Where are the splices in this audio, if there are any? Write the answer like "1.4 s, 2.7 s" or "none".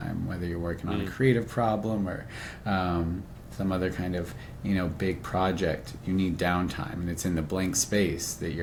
none

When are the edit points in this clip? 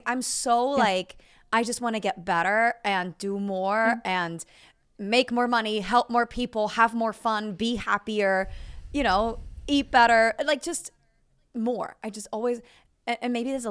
none

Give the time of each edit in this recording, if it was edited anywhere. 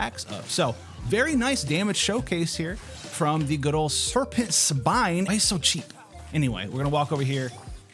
5.3 s

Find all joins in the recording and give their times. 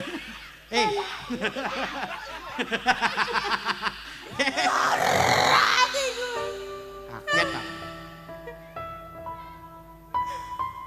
4.6 s

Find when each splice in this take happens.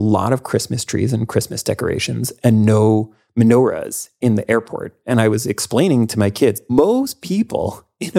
6.6 s

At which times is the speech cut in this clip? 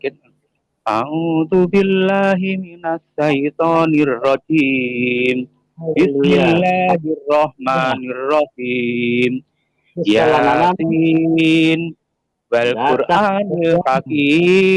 none

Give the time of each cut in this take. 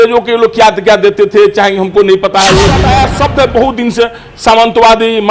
2.8 s

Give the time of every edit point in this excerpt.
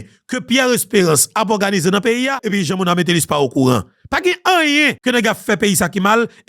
2.4 s, 5.0 s

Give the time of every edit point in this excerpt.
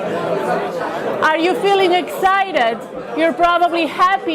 2.1 s

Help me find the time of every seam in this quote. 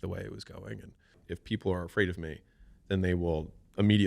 1.3 s

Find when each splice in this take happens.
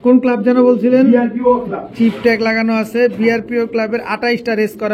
none

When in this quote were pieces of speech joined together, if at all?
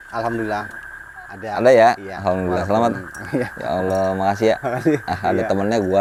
none

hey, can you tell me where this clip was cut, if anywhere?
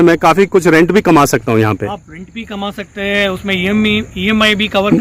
none

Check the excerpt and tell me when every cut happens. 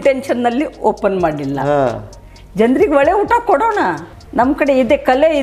4.1 s

